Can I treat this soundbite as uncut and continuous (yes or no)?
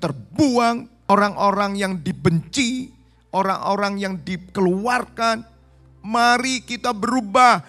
no